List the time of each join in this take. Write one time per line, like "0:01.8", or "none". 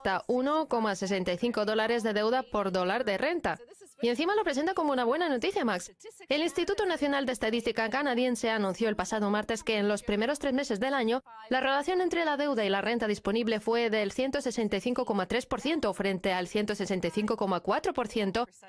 none